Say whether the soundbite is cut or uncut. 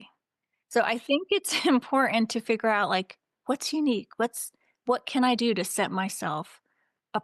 uncut